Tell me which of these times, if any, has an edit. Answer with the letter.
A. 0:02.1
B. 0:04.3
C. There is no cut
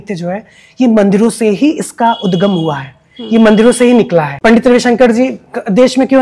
B